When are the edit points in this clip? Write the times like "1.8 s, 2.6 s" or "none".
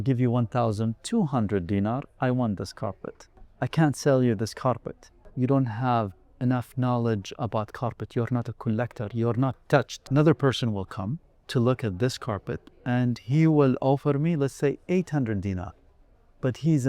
3.5 s, 5.2 s, 10.0 s